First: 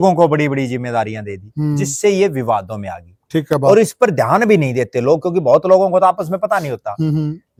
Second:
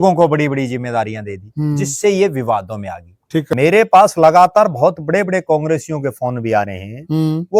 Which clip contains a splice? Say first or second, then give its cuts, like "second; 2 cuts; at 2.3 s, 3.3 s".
second; 1 cut; at 3.5 s